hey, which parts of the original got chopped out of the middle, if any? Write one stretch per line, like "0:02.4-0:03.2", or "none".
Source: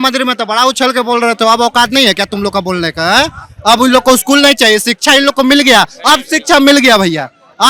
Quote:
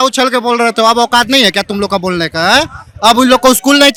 none

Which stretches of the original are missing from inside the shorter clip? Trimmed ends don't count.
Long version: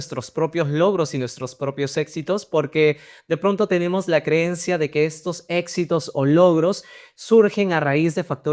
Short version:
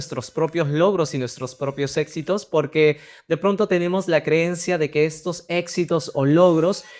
none

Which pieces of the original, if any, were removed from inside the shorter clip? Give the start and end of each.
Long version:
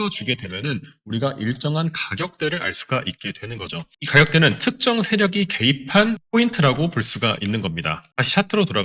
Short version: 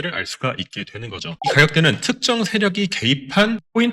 0:03.9-0:04.0

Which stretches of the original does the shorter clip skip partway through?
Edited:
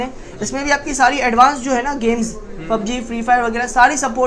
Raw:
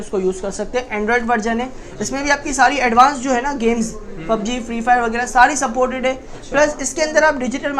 none

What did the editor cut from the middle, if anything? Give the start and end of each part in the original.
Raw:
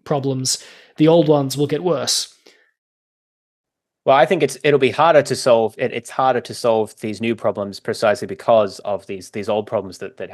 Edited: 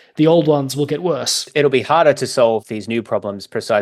0:02.3-0:04.6
0:05.7-0:07.0

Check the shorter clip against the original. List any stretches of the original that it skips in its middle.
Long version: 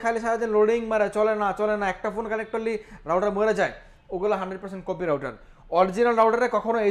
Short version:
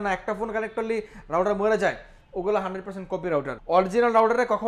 0:05.3-0:05.6

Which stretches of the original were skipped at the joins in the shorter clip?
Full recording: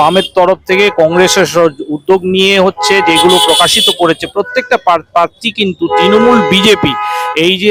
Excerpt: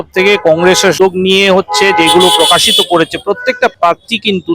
0:01.5-0:02.0
0:04.8-0:05.1

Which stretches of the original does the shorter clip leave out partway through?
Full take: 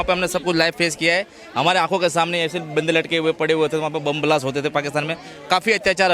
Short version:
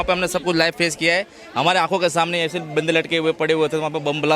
none

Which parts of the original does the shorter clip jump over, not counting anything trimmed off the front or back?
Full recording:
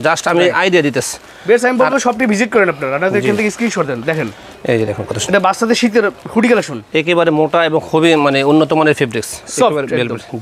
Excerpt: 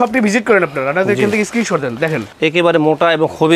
0:04.3-0:06.8

